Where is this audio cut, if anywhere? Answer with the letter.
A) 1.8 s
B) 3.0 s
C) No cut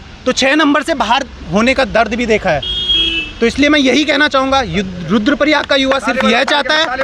C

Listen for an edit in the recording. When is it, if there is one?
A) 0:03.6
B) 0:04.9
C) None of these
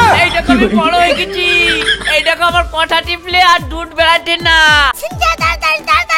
B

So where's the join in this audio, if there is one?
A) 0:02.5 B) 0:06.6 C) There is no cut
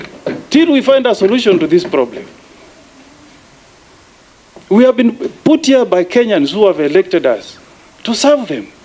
C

